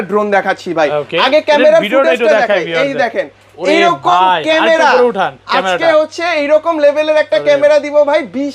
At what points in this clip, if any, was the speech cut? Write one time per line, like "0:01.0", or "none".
none